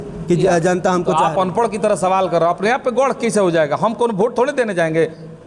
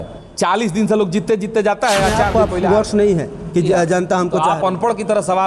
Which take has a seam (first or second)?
second